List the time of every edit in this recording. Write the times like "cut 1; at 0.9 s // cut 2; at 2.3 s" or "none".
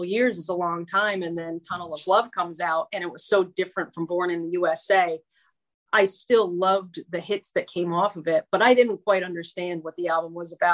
none